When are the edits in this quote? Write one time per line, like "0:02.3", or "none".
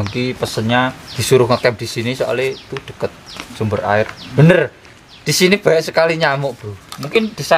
0:01.1
0:04.2